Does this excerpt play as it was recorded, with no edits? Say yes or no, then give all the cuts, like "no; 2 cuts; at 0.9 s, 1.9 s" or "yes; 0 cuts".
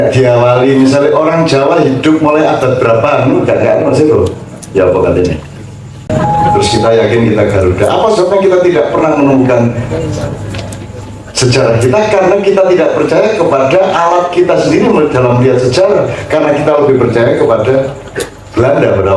no; 1 cut; at 6.0 s